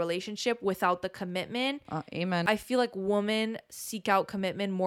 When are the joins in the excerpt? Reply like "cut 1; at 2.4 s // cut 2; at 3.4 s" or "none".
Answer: cut 1; at 2.4 s